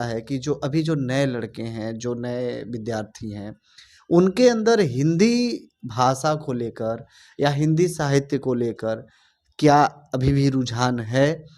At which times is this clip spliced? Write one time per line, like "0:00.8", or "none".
none